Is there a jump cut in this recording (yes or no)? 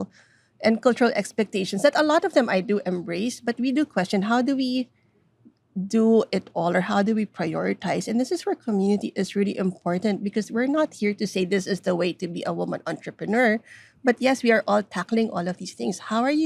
no